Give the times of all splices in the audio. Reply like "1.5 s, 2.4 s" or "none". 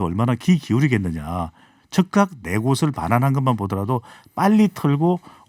none